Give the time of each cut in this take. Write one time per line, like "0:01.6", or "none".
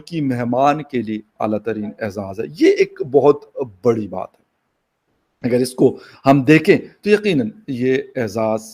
none